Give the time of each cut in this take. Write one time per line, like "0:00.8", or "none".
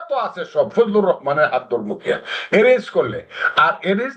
none